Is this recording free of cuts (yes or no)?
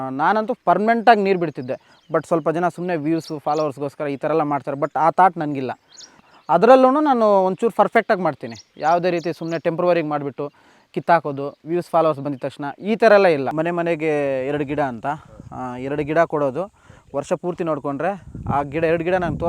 no